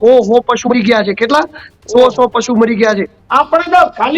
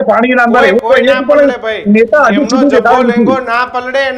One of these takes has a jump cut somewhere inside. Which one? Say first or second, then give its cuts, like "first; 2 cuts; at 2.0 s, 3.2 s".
first; 1 cut; at 3.1 s